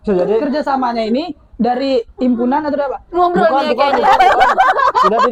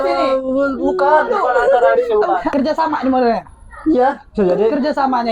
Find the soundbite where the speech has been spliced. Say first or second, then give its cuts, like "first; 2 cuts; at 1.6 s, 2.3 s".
second; 1 cut; at 2.5 s